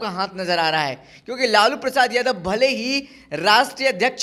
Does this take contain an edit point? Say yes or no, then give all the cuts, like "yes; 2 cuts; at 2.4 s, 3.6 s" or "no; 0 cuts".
no; 0 cuts